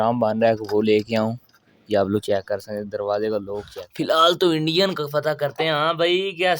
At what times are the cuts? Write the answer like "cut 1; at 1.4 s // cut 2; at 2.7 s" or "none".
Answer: cut 1; at 3.8 s